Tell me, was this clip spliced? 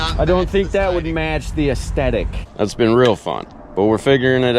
yes; 1 cut; at 2.4 s

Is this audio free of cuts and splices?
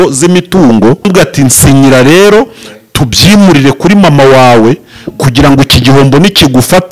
no; 1 cut; at 1.1 s

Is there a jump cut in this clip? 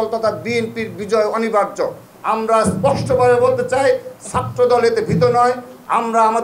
yes; 1 cut; at 2.1 s

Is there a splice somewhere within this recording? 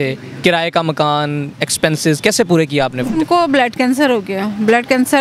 yes; 1 cut; at 3.2 s

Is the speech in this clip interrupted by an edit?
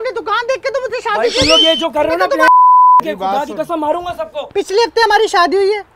yes; 1 cut; at 4.5 s

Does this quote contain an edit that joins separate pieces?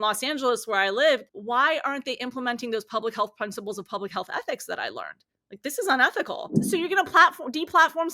yes; 2 cuts; at 1.3 s, 6.6 s

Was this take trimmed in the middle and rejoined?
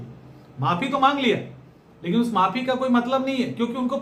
no; 0 cuts

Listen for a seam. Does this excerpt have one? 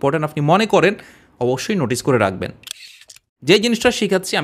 yes; 1 cut; at 2.8 s

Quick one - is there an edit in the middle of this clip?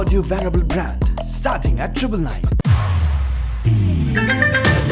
no; 0 cuts

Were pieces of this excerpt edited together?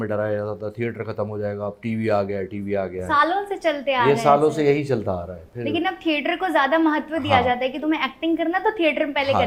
no; 0 cuts

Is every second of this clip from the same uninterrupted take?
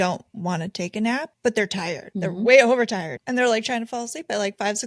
no; 3 cuts; at 1.3 s, 2.1 s, 3.2 s

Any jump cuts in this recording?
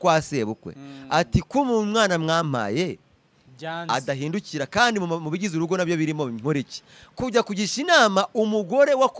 no; 0 cuts

